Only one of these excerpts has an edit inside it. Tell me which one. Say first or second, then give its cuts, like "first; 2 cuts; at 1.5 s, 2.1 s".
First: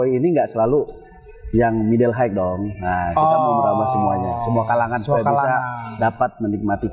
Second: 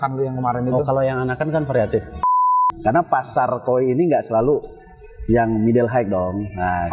second; 1 cut; at 2.4 s